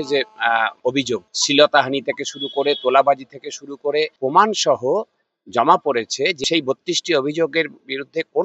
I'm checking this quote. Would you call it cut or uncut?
cut